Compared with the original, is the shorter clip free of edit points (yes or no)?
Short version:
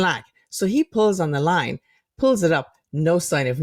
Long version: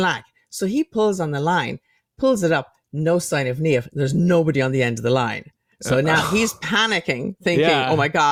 yes